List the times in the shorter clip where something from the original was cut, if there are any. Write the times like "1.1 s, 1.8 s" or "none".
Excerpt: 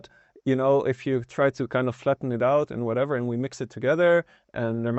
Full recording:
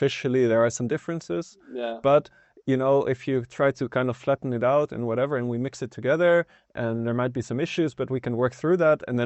none